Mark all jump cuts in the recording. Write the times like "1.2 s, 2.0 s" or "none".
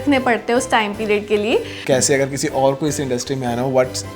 1.7 s